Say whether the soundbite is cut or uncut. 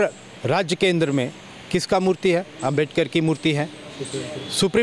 uncut